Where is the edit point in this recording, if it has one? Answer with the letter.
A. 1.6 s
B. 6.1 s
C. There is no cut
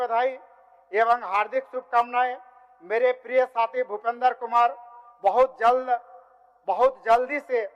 C